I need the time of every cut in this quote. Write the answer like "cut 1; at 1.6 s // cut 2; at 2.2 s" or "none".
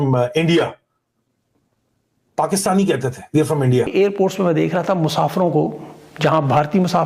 cut 1; at 3.9 s